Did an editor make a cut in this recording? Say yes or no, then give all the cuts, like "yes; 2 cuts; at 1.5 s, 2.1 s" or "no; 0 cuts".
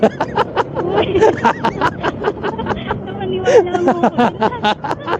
no; 0 cuts